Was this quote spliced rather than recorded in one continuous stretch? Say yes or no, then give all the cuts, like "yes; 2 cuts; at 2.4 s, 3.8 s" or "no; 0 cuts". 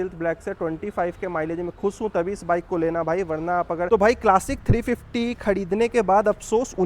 yes; 1 cut; at 3.9 s